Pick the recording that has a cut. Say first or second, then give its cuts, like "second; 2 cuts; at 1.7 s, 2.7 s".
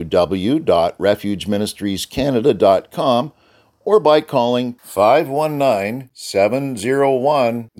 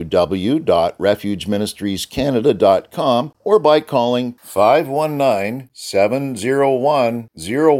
second; 1 cut; at 3.3 s